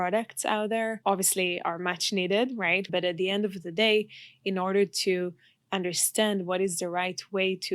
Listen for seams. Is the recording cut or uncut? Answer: cut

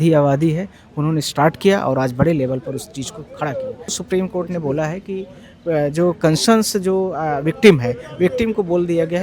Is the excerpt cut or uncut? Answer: cut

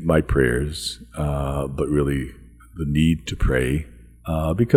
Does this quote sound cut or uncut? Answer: uncut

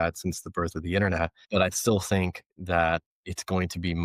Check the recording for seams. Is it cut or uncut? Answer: cut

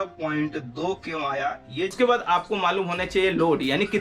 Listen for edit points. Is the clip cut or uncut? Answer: cut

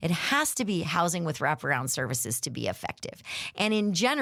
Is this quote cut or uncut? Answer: uncut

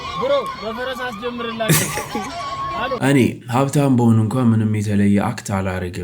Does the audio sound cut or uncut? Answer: cut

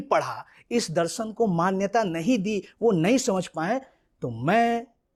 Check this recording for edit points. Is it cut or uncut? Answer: uncut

